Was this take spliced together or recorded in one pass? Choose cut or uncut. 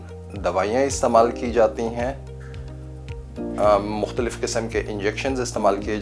uncut